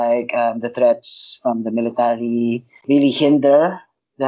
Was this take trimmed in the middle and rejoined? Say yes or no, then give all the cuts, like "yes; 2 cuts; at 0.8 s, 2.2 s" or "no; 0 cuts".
yes; 1 cut; at 2.7 s